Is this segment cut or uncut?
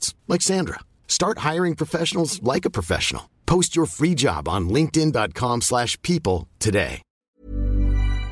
cut